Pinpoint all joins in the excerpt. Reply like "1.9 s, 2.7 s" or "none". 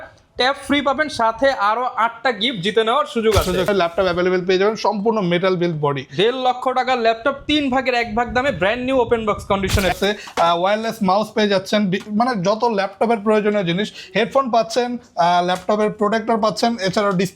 3.7 s, 10.0 s